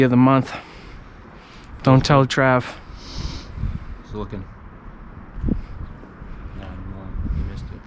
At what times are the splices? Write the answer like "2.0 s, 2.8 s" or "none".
none